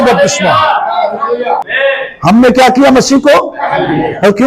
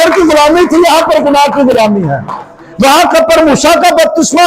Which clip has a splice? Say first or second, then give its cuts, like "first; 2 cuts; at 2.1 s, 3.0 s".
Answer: first; 1 cut; at 1.7 s